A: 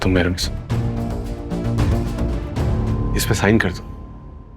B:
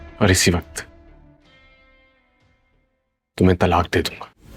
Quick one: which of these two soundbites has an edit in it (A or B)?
A